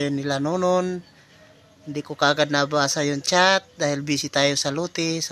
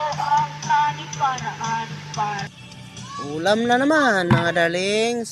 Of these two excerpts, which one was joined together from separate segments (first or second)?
second